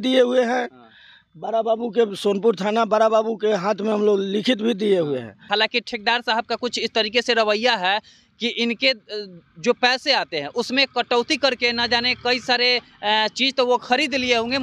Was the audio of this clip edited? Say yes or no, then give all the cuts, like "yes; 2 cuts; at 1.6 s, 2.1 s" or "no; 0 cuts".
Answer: yes; 1 cut; at 5.5 s